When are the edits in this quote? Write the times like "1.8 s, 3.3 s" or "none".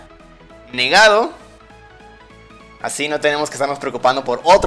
none